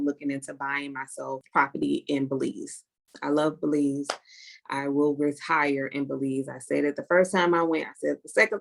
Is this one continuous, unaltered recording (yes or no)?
no